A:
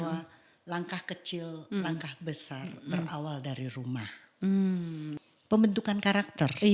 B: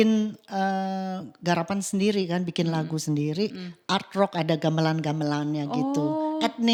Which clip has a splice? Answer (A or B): A